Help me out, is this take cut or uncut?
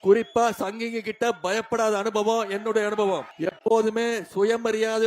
cut